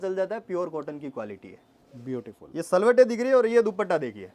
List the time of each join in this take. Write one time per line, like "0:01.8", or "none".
none